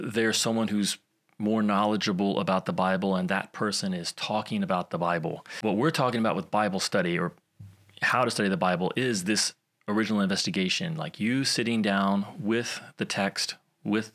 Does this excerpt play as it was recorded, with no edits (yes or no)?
no